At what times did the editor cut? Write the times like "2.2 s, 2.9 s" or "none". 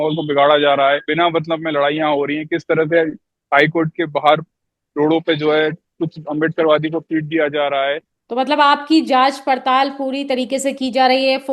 1.1 s, 8.1 s